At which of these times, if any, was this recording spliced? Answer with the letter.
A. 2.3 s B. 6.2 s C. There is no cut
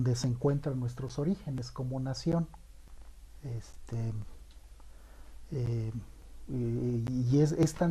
A